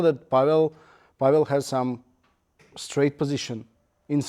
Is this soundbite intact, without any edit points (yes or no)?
yes